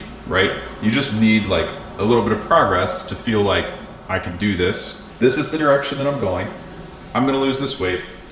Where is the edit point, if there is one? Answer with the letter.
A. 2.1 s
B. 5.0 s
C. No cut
B